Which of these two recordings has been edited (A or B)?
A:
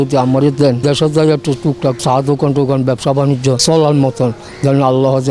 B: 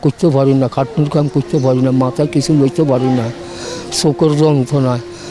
A